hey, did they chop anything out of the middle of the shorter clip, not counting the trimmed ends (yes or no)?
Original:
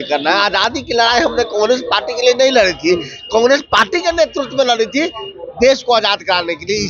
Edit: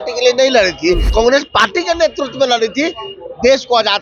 yes